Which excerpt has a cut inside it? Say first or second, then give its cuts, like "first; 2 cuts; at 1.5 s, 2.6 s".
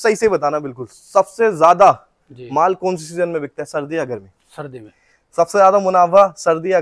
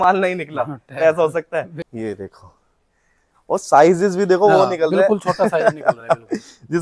second; 1 cut; at 1.8 s